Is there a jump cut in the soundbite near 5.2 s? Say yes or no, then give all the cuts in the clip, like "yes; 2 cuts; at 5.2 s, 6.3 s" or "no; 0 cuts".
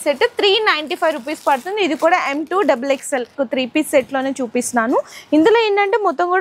no; 1 cut; at 3.3 s